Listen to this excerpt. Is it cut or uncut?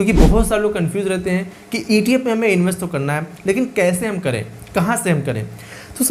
uncut